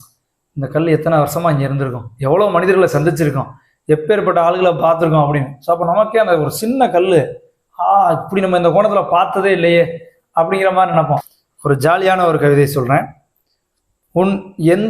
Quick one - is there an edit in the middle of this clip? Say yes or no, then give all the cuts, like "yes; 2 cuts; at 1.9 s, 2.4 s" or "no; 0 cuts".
yes; 1 cut; at 11.3 s